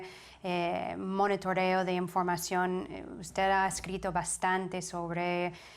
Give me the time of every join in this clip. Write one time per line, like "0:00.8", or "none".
0:02.3